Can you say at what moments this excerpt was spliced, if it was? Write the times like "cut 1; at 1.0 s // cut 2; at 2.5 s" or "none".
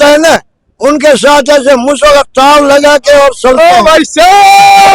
none